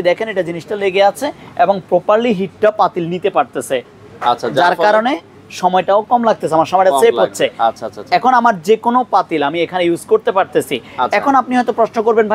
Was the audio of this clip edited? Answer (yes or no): no